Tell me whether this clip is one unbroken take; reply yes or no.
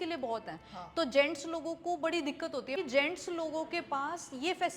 no